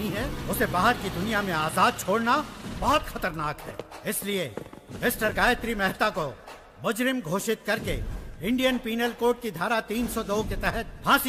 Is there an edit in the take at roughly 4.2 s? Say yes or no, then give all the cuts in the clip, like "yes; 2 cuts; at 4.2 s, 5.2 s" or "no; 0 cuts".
no; 0 cuts